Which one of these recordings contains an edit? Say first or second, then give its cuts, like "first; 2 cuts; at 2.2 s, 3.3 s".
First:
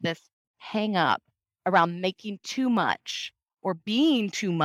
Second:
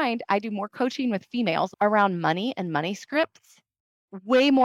second; 1 cut; at 1.7 s